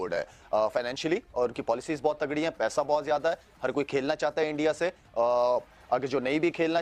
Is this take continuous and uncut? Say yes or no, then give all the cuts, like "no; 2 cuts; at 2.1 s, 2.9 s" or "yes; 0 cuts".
yes; 0 cuts